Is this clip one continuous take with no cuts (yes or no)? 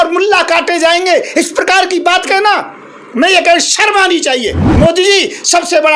no